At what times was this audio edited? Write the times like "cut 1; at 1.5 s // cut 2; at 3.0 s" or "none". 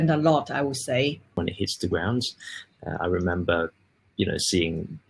cut 1; at 1.3 s